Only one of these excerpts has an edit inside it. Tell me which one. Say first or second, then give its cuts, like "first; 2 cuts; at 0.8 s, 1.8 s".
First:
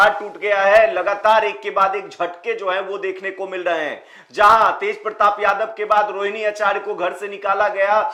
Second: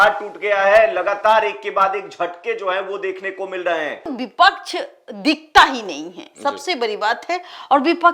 second; 1 cut; at 4.1 s